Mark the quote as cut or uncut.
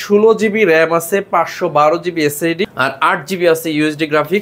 cut